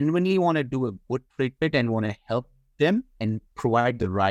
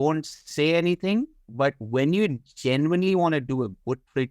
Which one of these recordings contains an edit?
second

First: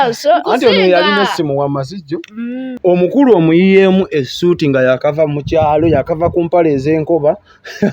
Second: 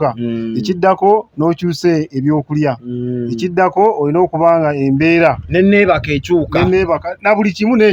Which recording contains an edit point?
first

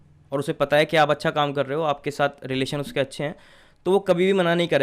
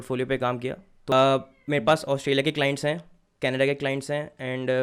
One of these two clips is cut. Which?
second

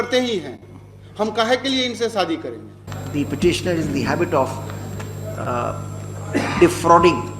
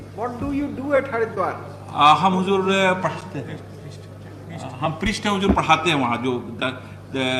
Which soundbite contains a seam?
first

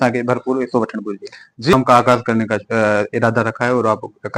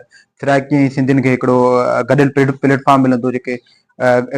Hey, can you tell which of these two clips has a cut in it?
first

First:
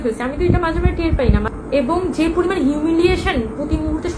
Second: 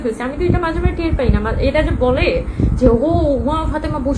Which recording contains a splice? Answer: first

